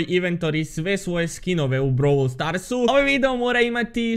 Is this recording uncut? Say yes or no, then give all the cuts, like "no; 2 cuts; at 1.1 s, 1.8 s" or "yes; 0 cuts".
no; 1 cut; at 2.9 s